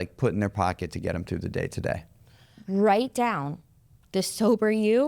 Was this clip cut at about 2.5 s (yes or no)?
yes